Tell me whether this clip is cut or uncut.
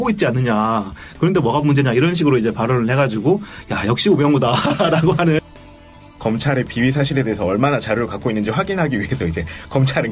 cut